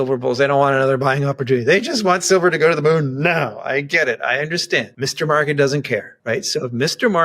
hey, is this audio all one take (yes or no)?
no